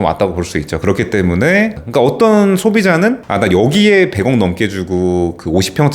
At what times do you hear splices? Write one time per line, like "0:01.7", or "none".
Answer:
0:01.8
0:03.2